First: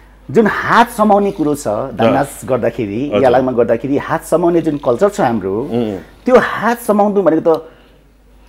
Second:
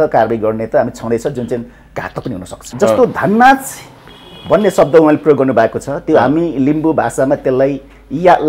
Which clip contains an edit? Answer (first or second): second